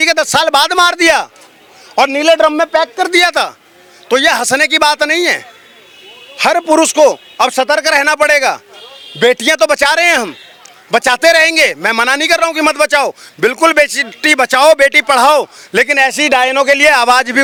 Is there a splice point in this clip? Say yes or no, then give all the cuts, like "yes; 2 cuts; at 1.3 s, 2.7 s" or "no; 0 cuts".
no; 0 cuts